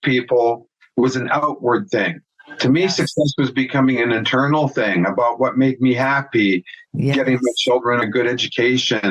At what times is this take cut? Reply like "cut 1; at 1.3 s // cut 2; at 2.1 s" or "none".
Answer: cut 1; at 8.0 s